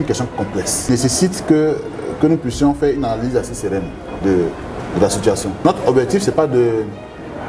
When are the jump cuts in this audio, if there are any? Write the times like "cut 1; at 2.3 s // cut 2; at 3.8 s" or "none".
cut 1; at 0.9 s // cut 2; at 5.6 s